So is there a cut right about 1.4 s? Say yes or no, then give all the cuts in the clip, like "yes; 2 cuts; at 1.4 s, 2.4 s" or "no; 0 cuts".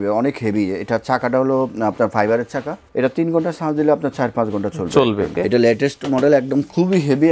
no; 2 cuts; at 2.9 s, 5.3 s